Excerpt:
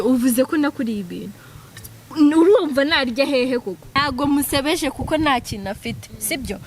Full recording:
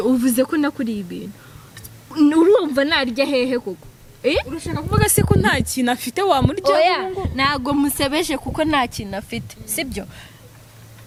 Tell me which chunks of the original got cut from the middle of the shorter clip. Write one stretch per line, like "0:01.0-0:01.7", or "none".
0:03.9-0:07.4